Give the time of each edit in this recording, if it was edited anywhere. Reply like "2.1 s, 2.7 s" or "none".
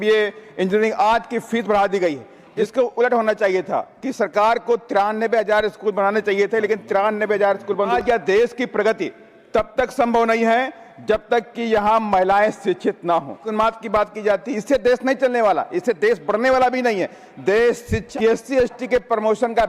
2.6 s, 7.9 s, 13.5 s, 18.0 s